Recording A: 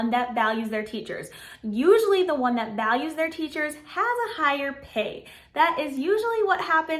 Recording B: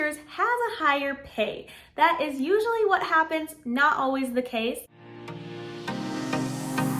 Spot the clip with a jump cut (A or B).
B